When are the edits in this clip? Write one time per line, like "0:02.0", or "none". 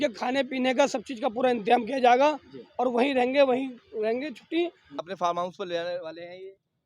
0:04.9